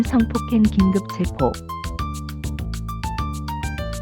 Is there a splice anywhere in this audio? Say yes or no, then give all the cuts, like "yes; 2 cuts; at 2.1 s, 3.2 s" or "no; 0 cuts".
yes; 1 cut; at 1.6 s